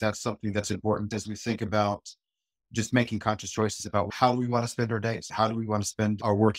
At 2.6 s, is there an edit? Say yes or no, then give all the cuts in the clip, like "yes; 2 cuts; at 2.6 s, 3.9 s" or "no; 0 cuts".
no; 3 cuts; at 1.1 s, 4.1 s, 5.3 s